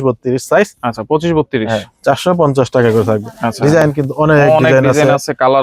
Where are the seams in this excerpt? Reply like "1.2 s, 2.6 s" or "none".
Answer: none